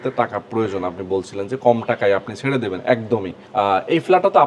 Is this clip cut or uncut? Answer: uncut